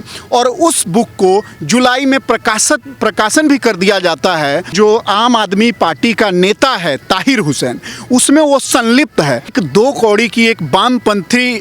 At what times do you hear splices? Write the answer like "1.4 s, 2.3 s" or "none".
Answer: 4.7 s, 9.5 s